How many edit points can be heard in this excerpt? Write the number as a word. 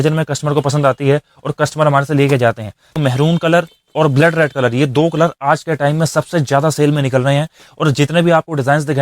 one